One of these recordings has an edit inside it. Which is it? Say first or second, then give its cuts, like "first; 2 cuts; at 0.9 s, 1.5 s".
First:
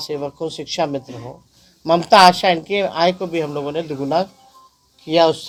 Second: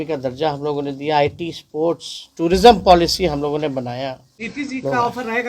second; 1 cut; at 4.3 s